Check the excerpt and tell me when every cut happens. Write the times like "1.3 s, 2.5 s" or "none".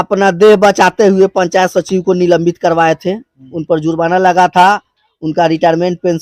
none